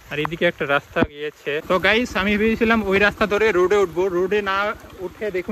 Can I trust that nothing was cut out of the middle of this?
no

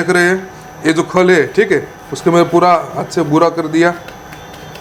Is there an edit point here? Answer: no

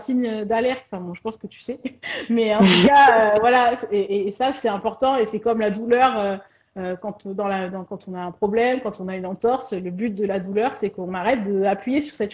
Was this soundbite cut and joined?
no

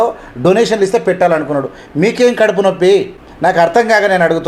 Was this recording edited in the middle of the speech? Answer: yes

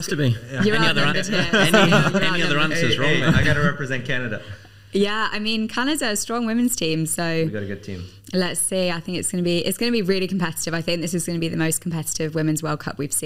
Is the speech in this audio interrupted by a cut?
no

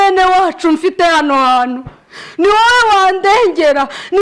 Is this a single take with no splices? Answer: yes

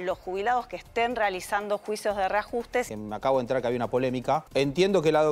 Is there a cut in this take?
yes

